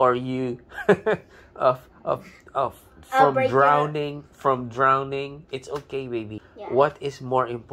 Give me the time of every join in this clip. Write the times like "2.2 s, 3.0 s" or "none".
6.4 s